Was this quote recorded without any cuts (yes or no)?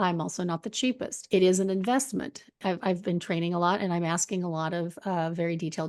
no